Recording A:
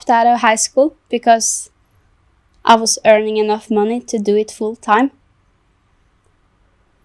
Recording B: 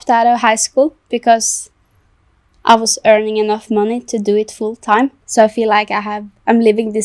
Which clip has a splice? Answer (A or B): B